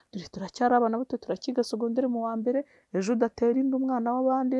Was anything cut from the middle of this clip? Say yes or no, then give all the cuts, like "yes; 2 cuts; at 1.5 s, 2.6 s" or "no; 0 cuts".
no; 0 cuts